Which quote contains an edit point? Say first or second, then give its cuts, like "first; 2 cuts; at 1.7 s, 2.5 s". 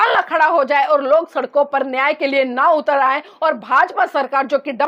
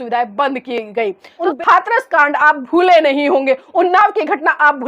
second; 1 cut; at 1.4 s